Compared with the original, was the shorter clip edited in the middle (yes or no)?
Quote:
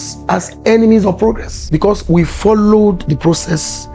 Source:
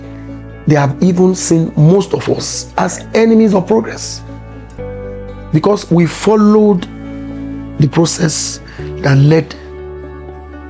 yes